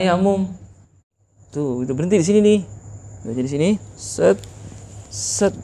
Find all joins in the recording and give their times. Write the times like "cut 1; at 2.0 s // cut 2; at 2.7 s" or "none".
cut 1; at 1.1 s